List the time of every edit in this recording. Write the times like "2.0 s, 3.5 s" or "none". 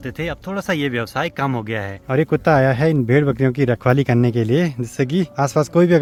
none